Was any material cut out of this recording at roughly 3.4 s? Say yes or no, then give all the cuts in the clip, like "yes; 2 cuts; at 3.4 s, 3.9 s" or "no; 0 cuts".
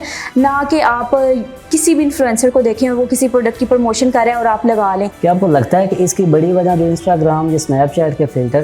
no; 1 cut; at 5.1 s